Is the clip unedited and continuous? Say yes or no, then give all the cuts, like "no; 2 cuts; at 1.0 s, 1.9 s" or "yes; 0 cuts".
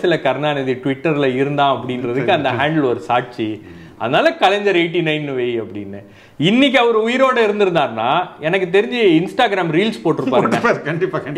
yes; 0 cuts